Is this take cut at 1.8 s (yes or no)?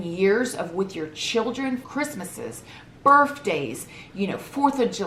yes